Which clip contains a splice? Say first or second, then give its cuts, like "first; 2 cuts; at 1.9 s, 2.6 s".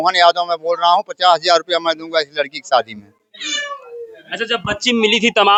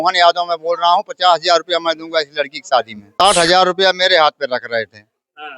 second; 1 cut; at 3.0 s